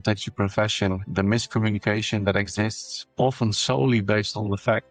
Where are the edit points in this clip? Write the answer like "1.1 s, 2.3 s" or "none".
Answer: none